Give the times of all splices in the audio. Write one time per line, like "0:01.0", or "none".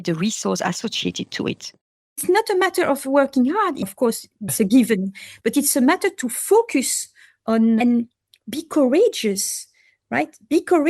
0:01.8